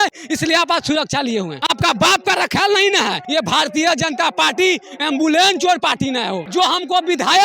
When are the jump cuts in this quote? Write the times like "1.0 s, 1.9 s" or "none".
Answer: 1.5 s, 3.2 s, 6.4 s